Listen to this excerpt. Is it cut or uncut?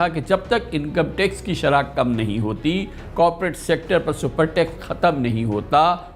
uncut